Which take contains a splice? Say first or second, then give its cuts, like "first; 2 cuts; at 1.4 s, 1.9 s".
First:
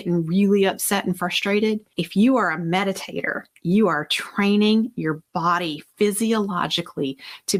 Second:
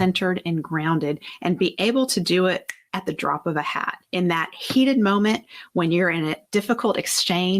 second; 3 cuts; at 1.3 s, 2.8 s, 4.0 s